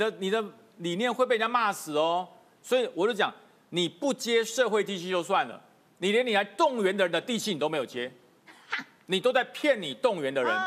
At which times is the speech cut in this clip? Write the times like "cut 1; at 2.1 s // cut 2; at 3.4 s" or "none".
none